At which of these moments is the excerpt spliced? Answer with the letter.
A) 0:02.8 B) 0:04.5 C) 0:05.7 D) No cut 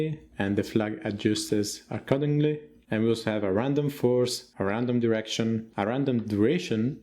A